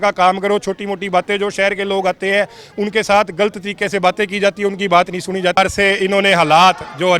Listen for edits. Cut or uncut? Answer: cut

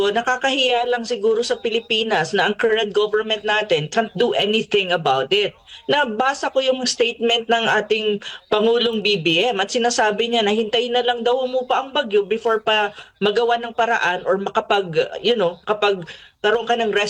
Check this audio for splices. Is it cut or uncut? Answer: uncut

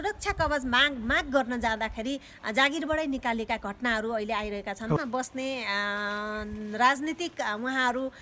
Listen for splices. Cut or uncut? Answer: cut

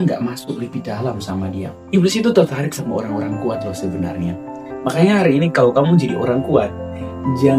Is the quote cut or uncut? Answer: cut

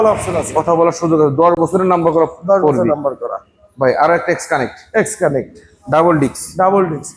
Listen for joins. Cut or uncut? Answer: uncut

